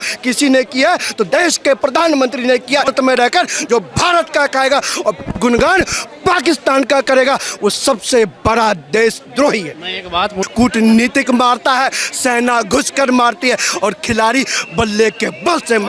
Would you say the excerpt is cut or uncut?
cut